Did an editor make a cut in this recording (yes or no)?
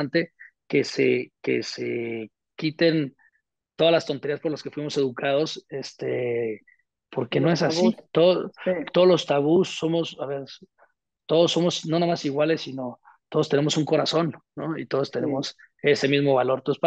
no